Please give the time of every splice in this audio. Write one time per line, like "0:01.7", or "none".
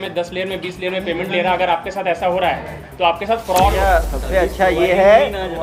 0:03.9